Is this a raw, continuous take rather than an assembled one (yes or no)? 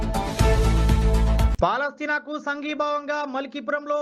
yes